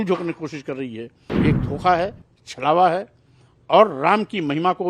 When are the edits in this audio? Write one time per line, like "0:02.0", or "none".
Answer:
0:01.2